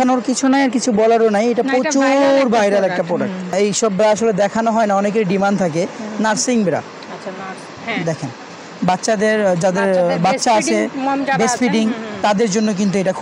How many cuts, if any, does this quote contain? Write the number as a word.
one